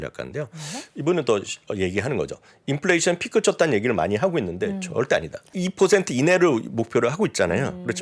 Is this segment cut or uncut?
cut